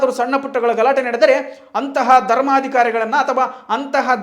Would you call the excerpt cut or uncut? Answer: uncut